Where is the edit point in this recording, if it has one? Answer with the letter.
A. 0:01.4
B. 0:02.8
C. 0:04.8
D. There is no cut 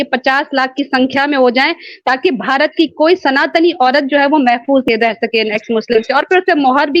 C